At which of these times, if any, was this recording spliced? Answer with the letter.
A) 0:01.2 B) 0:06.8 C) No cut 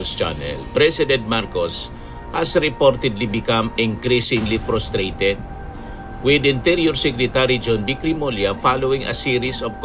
C